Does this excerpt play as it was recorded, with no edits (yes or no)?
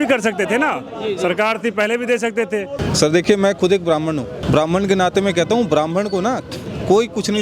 no